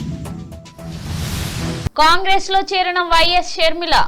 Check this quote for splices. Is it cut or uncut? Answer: uncut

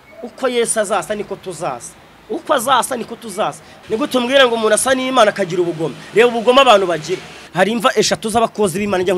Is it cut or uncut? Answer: cut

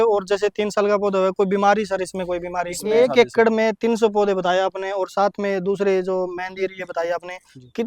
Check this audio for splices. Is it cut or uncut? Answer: cut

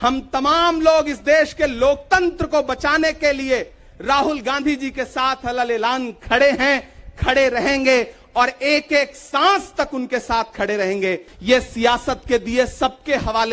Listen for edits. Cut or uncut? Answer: cut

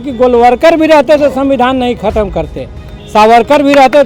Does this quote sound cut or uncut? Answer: uncut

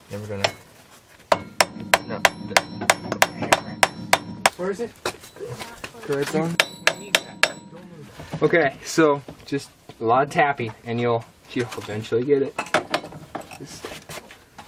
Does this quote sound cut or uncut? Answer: uncut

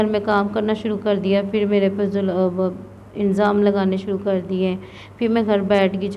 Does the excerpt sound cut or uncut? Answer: uncut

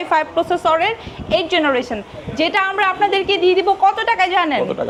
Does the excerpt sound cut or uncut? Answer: uncut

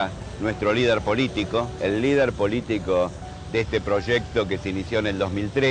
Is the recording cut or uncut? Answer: uncut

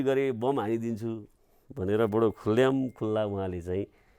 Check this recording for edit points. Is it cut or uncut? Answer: uncut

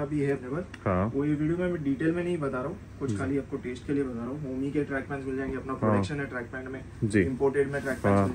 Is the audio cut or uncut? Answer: uncut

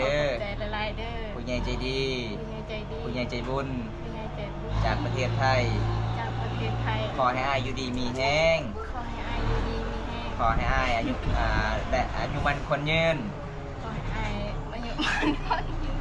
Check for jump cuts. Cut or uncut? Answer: uncut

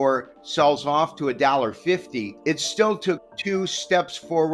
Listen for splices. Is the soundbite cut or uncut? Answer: cut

